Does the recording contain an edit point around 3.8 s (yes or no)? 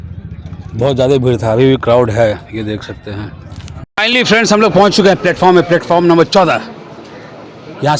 yes